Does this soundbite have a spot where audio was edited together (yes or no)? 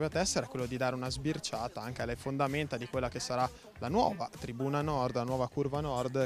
yes